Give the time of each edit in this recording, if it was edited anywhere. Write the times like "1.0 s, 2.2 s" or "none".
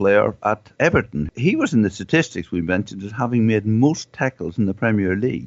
1.2 s